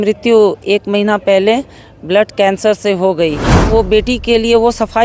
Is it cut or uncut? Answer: cut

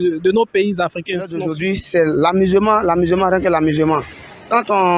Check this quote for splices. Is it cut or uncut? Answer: cut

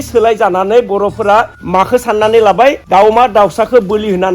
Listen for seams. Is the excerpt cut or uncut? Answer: cut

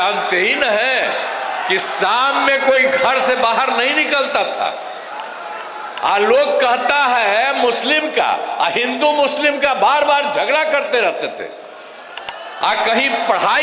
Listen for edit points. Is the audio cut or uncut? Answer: uncut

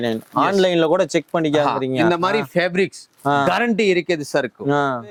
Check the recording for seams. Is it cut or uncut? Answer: uncut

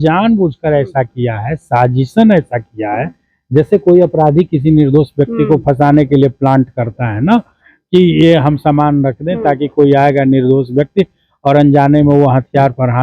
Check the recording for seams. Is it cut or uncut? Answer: uncut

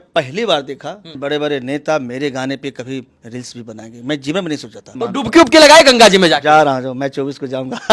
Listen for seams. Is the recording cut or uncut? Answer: cut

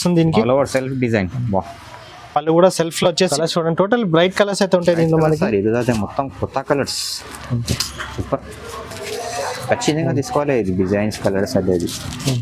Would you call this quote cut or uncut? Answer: cut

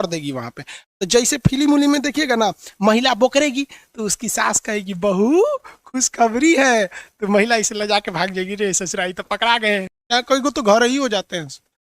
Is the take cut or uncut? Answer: cut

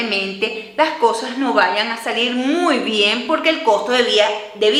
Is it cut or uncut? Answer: uncut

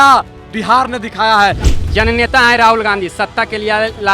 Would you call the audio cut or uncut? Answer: cut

